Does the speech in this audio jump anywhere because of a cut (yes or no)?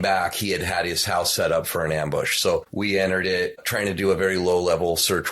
yes